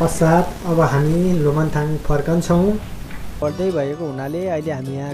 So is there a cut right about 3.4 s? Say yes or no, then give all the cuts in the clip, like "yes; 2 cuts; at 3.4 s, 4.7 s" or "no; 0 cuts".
yes; 1 cut; at 3.4 s